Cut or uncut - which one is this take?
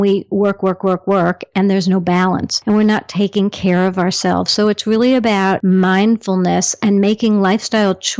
cut